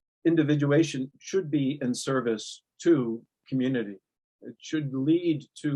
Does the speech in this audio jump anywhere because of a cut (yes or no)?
yes